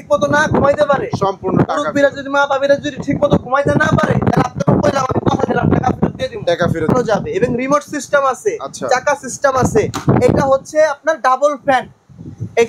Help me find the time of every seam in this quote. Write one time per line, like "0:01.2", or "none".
0:06.9